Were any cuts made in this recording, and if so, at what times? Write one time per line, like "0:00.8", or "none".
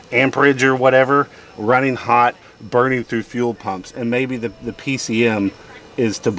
none

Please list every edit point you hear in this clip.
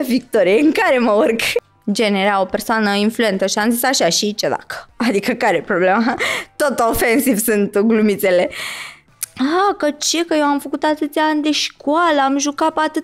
0:01.7
0:09.0

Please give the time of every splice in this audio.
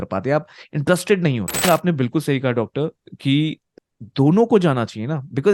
0:01.6
0:03.7

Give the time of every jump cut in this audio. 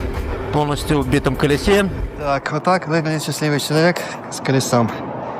0:02.1

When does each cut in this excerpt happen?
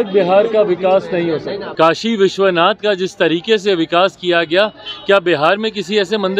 0:01.6

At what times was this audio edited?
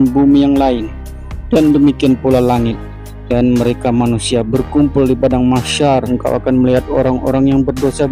0:06.1

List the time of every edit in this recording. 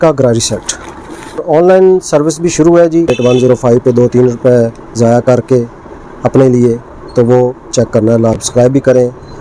0:01.4
0:03.1
0:08.4

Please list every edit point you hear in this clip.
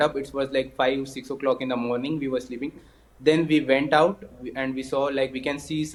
none

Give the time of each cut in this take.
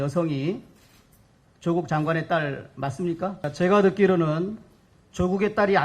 0:03.4

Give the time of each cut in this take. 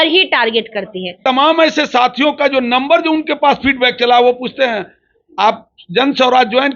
0:01.2

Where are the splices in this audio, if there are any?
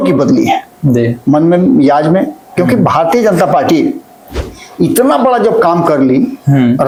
none

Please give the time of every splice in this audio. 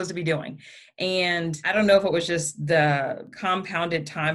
0:01.6
0:03.3

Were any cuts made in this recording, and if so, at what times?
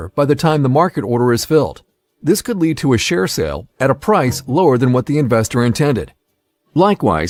none

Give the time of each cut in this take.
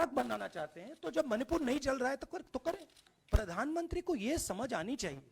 0:03.1

